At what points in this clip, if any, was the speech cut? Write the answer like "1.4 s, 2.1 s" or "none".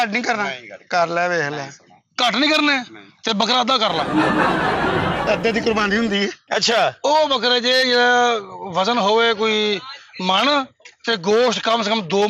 6.4 s